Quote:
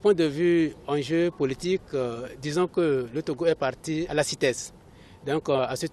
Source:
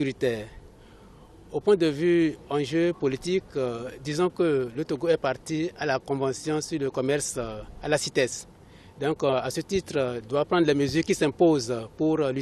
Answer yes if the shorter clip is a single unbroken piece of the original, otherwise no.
no